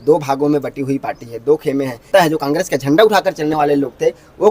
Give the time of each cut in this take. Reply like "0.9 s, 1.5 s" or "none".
2.1 s